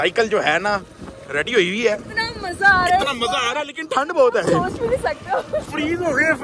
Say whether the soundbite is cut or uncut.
uncut